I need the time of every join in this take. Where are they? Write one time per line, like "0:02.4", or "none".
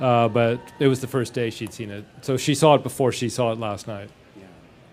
none